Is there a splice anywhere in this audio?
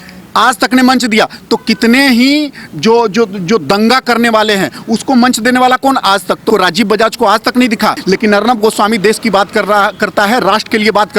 yes; 2 cuts; at 6.4 s, 8.0 s

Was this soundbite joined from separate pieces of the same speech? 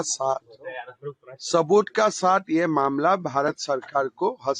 no; 0 cuts

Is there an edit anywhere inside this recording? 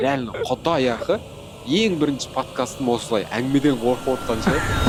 no; 0 cuts

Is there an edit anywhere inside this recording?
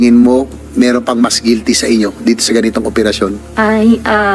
yes; 1 cut; at 3.4 s

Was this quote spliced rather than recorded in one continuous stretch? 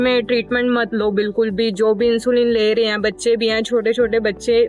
no; 0 cuts

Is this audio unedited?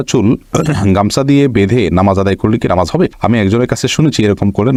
yes; 0 cuts

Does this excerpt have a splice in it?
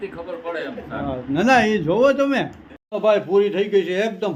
no; 0 cuts

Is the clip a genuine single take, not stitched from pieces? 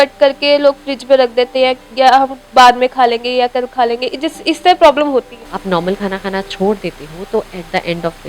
no; 1 cut; at 5.4 s

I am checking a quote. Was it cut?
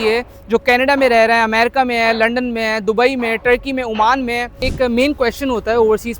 yes; 1 cut; at 4.6 s

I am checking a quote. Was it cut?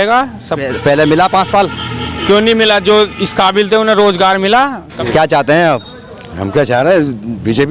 yes; 1 cut; at 4.9 s

